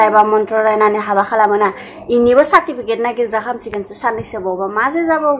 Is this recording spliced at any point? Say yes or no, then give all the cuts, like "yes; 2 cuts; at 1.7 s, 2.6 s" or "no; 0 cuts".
no; 0 cuts